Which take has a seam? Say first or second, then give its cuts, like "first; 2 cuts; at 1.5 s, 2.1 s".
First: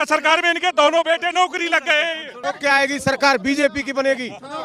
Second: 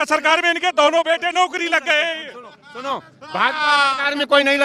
first; 1 cut; at 2.3 s